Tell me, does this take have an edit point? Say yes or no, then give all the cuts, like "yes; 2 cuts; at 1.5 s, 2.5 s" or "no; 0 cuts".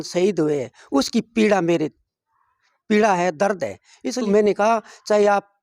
yes; 1 cut; at 4.2 s